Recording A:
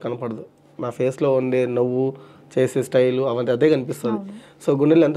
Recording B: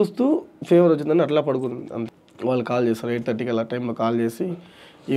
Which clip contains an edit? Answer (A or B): B